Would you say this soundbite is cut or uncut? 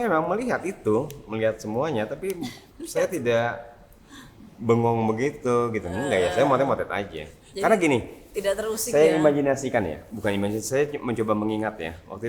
uncut